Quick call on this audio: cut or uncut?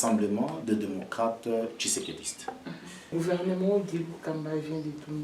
cut